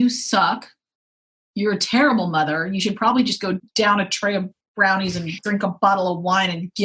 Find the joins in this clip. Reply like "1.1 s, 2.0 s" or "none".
3.6 s

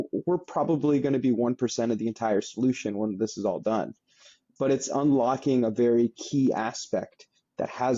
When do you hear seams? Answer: none

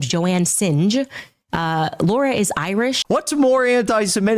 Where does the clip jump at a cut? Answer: 3.0 s

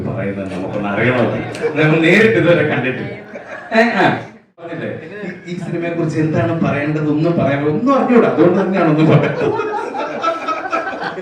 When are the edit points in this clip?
4.8 s

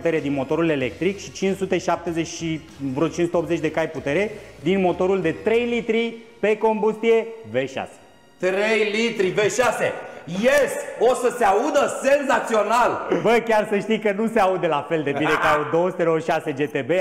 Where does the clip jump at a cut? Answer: none

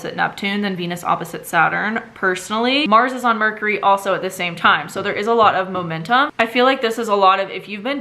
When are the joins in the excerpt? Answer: 2.9 s, 6.3 s

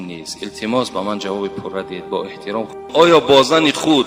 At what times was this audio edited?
2.9 s

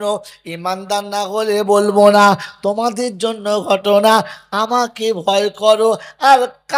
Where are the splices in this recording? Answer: none

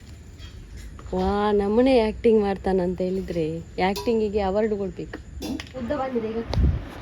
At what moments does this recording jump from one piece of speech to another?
5.8 s

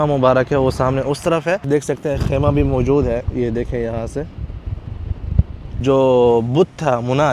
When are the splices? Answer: 1.6 s, 5.8 s

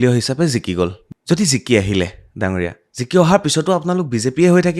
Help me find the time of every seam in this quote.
1.0 s

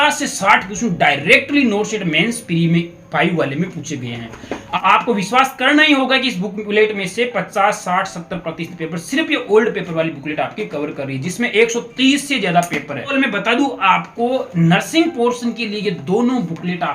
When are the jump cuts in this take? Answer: 4.8 s, 13.1 s

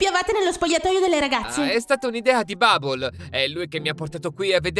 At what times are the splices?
1.7 s

